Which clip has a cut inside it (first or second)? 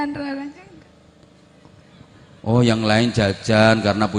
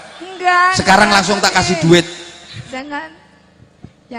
second